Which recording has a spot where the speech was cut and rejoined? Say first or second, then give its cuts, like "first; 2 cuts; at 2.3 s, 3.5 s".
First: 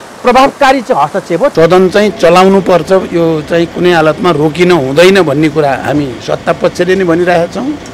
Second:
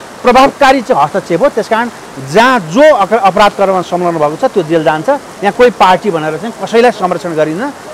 first; 1 cut; at 1.5 s